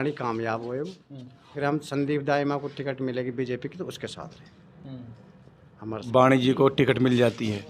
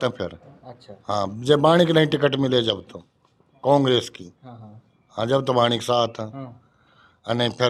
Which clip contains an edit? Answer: first; 2 cuts; at 1.5 s, 6.0 s

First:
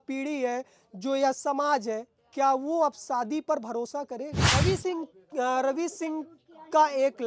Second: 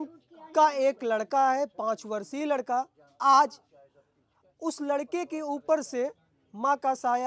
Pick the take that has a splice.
first; 1 cut; at 4.4 s

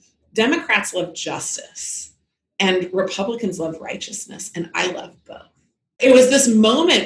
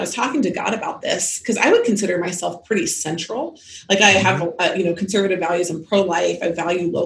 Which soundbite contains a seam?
first; 1 cut; at 6.0 s

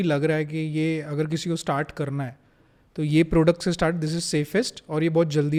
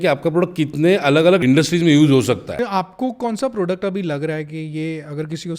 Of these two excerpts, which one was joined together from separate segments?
second; 2 cuts; at 1.4 s, 2.5 s

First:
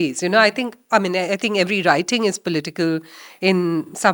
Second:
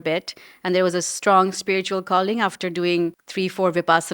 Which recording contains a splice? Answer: second; 1 cut; at 3.2 s

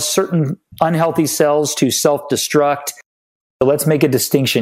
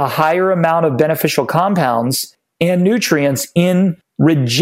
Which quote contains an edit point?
first; 1 cut; at 3.2 s

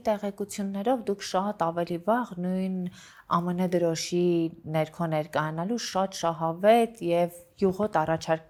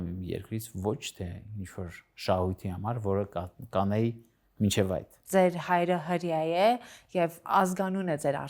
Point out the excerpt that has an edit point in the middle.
second; 1 cut; at 5.2 s

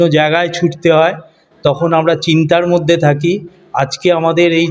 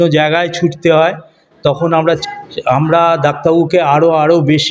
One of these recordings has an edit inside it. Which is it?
second; 1 cut; at 2.2 s

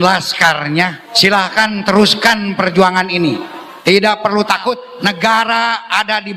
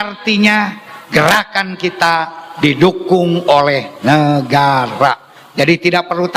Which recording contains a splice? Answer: first; 2 cuts; at 1.0 s, 4.9 s

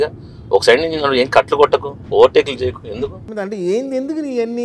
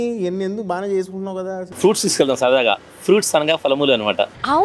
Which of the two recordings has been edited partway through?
second; 1 cut; at 1.6 s

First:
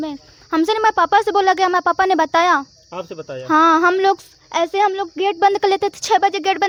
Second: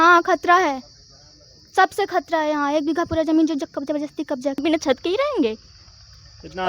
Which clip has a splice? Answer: second; 1 cut; at 4.6 s

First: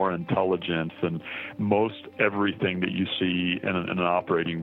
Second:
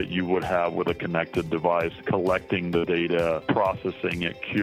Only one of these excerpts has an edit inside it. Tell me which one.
second; 2 cuts; at 2.0 s, 3.4 s

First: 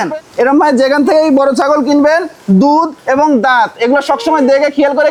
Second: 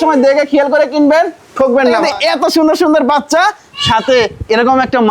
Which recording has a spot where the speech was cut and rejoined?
second; 1 cut; at 2.0 s

